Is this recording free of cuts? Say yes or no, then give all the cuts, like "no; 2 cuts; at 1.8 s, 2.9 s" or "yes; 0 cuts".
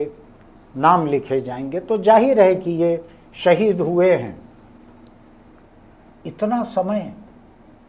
no; 1 cut; at 5.6 s